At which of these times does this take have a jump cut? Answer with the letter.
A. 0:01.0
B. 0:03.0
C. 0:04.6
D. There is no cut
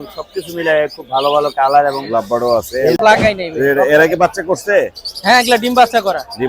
B